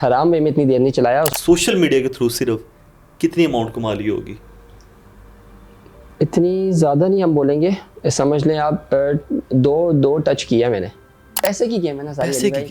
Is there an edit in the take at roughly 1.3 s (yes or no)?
yes